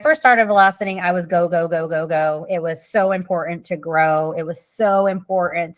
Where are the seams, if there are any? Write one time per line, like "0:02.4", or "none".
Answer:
none